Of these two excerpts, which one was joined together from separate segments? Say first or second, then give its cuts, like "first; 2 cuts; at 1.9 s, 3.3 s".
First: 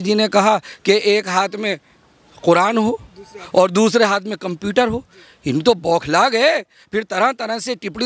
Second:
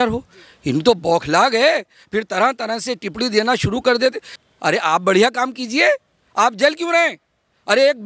second; 1 cut; at 4.3 s